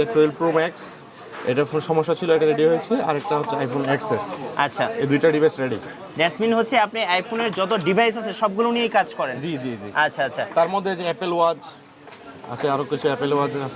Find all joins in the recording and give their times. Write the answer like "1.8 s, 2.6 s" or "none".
none